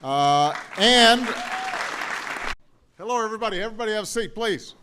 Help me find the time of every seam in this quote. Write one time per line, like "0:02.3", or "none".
none